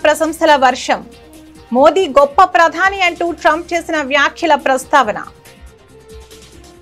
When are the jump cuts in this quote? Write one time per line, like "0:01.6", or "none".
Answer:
0:05.3